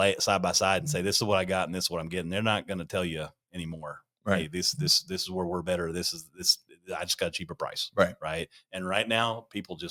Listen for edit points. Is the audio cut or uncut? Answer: uncut